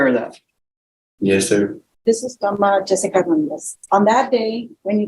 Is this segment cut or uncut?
cut